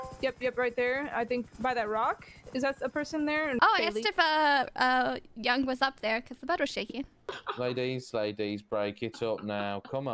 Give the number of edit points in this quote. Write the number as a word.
two